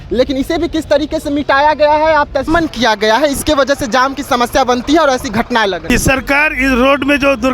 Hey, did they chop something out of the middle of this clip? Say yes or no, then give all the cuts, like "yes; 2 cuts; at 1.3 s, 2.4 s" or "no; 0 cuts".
yes; 2 cuts; at 2.5 s, 5.8 s